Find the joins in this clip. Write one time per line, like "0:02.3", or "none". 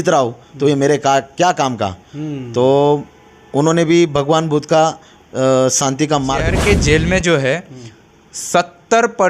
0:06.5